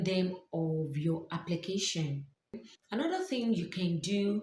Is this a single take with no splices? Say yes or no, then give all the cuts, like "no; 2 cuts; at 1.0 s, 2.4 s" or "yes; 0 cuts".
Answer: no; 1 cut; at 2.7 s